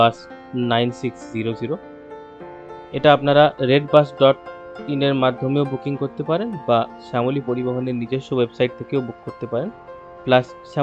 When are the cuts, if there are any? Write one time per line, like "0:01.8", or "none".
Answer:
none